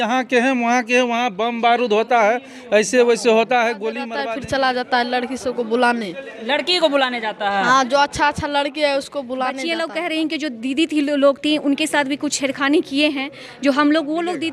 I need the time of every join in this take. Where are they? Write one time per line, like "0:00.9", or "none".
0:04.1
0:09.6